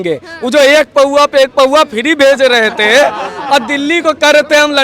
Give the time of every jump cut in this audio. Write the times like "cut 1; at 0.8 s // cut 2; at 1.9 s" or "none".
none